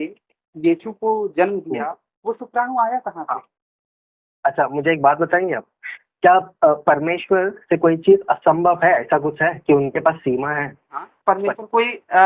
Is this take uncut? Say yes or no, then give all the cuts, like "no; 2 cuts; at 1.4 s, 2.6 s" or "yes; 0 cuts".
no; 1 cut; at 11.1 s